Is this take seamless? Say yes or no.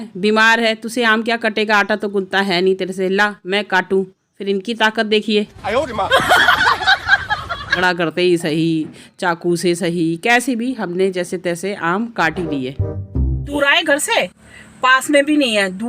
no